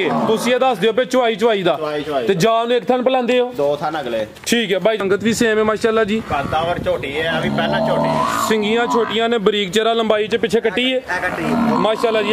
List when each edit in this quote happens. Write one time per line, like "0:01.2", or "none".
0:05.0